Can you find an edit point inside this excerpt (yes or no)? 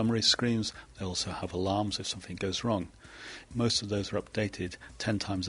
yes